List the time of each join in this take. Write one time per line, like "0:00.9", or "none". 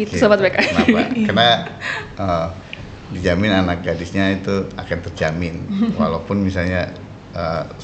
none